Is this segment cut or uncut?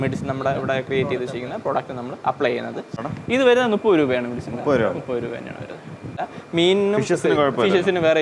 cut